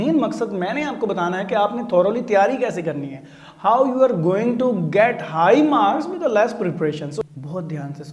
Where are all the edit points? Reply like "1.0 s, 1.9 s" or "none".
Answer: 7.1 s